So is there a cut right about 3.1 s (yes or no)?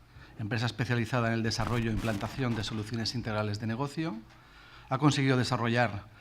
yes